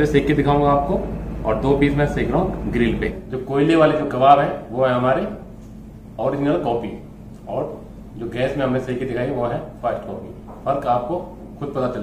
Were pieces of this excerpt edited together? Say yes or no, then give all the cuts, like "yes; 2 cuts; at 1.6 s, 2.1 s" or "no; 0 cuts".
yes; 1 cut; at 3.2 s